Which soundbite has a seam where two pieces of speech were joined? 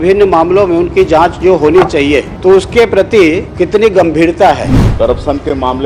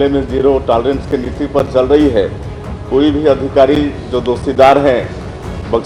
first; 3 cuts; at 2.3 s, 3.5 s, 4.8 s

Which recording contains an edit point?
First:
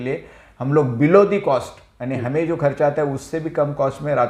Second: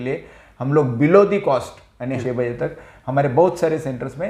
second; 1 cut; at 2.2 s

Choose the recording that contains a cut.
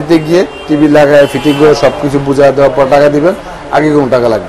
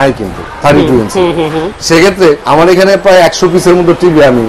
second; 1 cut; at 2.4 s

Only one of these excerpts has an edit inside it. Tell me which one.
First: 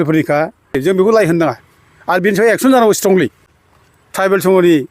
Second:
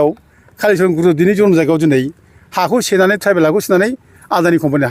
first; 2 cuts; at 0.8 s, 3.5 s

